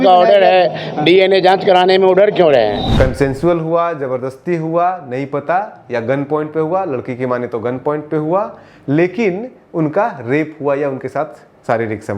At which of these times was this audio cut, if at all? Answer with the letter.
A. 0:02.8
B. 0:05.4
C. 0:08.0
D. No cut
A